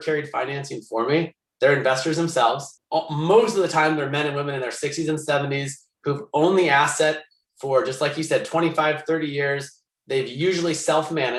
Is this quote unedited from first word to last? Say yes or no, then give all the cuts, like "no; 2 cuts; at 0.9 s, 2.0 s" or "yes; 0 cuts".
yes; 0 cuts